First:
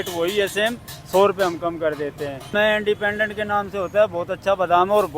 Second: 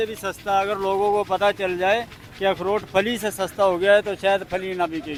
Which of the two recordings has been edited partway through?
first; 1 cut; at 2.5 s

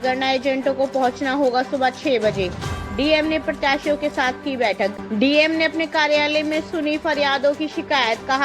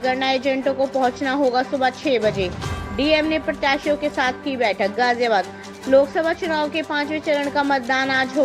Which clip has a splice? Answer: first; 1 cut; at 4.9 s

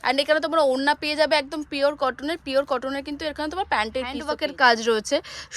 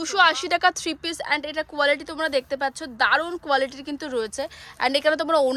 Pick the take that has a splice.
first; 1 cut; at 4.3 s

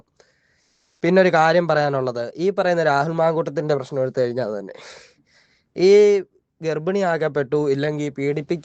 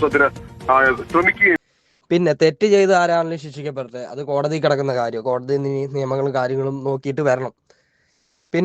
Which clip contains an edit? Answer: second; 1 cut; at 1.6 s

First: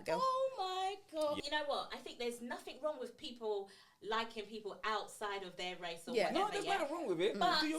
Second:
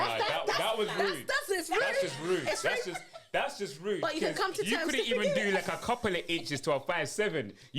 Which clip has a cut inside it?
first; 1 cut; at 1.4 s

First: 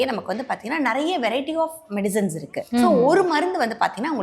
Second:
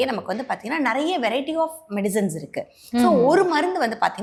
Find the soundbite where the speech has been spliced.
first; 1 cut; at 2.6 s

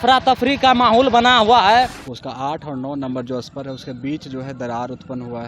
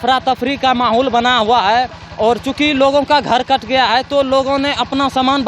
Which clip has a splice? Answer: first; 1 cut; at 2.0 s

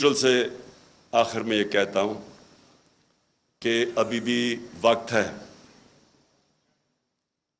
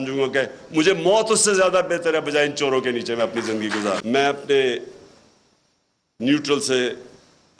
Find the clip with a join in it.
second; 1 cut; at 4.0 s

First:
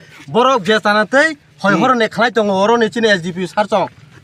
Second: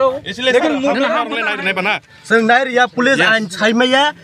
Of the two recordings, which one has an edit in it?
second; 1 cut; at 1.4 s

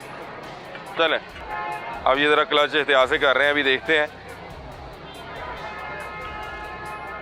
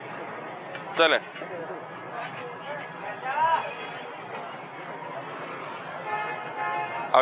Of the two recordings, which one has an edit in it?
first; 1 cut; at 1.4 s

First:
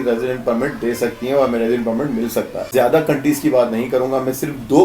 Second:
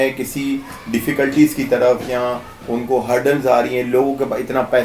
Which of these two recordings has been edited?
first; 1 cut; at 2.7 s

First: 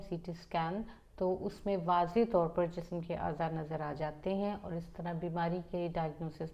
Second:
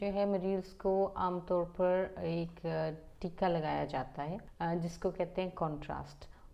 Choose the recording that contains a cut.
second; 1 cut; at 4.5 s

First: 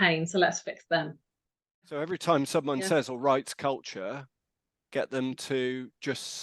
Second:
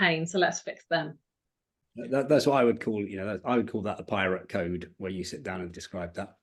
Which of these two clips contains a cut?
first; 1 cut; at 1.9 s

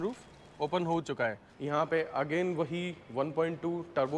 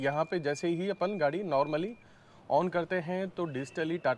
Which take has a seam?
first; 1 cut; at 1.5 s

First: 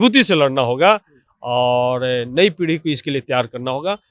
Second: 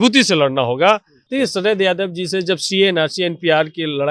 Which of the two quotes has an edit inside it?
second; 1 cut; at 1.2 s

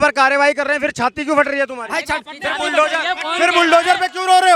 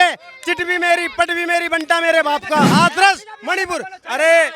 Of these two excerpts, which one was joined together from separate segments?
second; 1 cut; at 2.7 s

